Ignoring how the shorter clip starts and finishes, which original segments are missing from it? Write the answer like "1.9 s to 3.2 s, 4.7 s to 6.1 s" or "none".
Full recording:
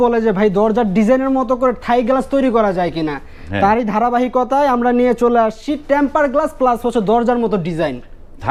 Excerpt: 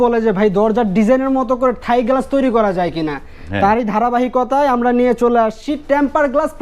none